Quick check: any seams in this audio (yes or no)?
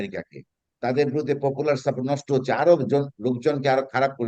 no